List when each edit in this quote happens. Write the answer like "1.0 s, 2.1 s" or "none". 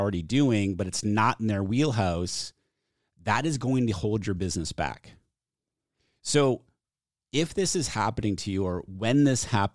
none